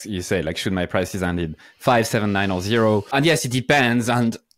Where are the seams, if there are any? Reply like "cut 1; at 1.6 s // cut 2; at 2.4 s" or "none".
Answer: cut 1; at 3.1 s

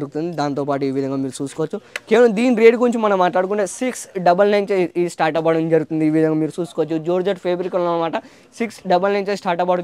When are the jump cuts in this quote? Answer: none

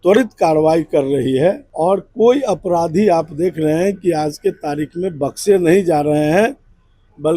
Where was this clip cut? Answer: cut 1; at 1.7 s

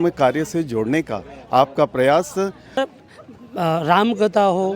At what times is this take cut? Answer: cut 1; at 2.8 s

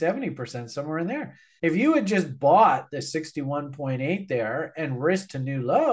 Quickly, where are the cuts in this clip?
cut 1; at 1.4 s

